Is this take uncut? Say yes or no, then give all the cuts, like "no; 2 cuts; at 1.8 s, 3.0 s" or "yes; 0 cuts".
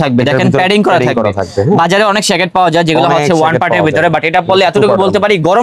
yes; 0 cuts